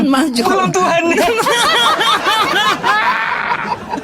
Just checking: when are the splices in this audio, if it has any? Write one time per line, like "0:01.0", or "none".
none